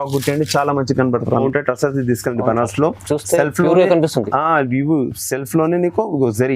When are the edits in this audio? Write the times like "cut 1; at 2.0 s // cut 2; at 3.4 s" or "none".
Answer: cut 1; at 1.4 s